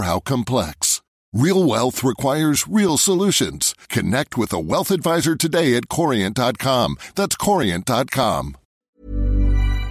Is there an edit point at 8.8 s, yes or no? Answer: yes